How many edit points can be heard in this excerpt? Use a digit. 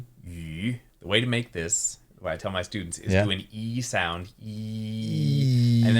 1